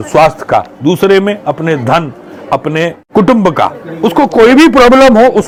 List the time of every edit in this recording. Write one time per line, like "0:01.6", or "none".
none